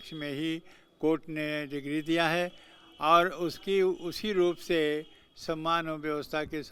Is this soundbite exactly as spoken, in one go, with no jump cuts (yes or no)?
yes